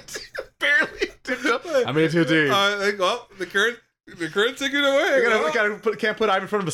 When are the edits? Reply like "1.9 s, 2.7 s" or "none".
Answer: none